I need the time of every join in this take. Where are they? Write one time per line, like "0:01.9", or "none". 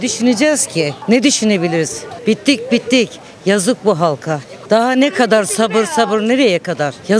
none